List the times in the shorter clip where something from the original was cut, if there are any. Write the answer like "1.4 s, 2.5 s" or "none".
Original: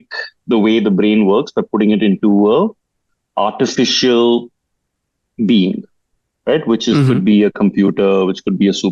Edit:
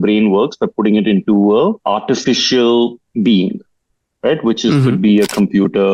1.8 s, 3.0 s